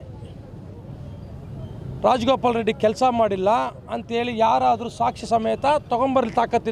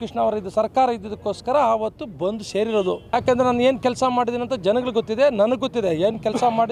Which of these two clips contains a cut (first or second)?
second